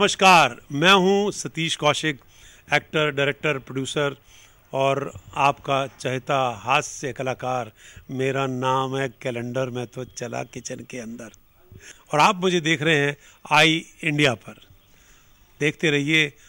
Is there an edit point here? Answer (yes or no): no